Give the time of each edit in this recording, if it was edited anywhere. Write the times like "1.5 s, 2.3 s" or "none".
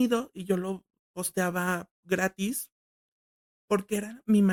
none